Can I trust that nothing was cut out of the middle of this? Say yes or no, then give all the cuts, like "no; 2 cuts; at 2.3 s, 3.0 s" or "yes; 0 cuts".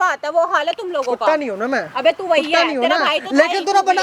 yes; 0 cuts